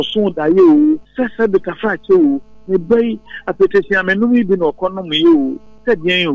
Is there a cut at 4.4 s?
no; 1 cut; at 1.1 s

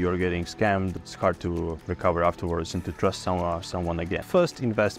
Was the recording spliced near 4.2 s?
yes; 2 cuts; at 1.0 s, 4.2 s

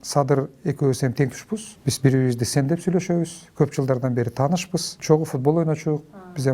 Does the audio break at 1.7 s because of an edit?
yes; 2 cuts; at 1.7 s, 4.9 s

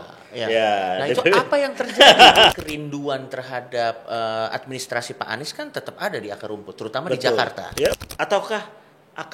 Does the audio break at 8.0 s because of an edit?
yes; 2 cuts; at 2.5 s, 8.0 s

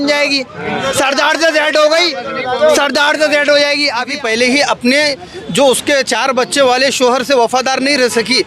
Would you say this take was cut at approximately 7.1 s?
no; 1 cut; at 4.1 s

